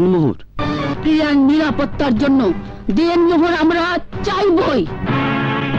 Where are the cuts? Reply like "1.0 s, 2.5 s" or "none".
1.0 s